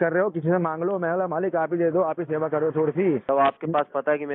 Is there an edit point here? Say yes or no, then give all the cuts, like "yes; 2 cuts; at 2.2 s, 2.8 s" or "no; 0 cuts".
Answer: yes; 1 cut; at 3.2 s